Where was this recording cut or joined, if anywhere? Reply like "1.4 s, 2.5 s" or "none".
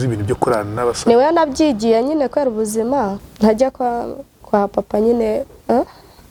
none